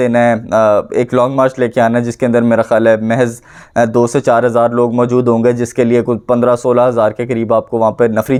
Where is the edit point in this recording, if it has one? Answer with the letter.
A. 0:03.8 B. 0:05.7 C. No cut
C